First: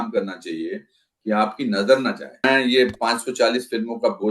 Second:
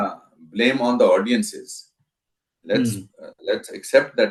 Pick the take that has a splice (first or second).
first